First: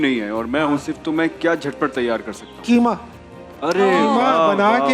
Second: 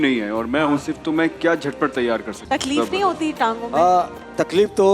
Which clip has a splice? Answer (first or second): second